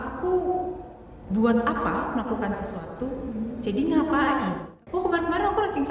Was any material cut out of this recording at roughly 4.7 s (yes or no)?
yes